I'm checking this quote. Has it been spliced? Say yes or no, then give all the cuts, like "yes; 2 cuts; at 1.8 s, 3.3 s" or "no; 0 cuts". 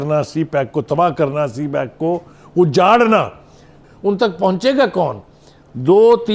no; 0 cuts